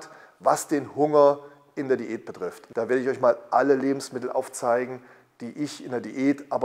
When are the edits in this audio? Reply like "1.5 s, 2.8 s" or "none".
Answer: 2.6 s